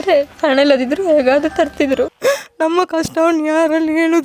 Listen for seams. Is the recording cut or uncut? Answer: cut